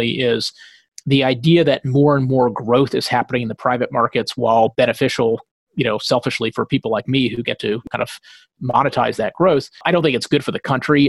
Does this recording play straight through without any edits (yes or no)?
no